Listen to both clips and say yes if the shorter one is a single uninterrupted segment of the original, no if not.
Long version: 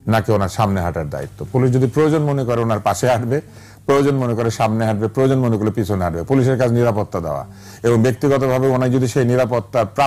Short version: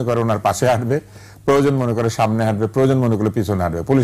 yes